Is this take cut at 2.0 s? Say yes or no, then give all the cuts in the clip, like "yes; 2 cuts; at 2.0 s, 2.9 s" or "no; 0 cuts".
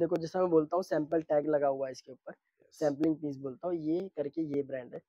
no; 0 cuts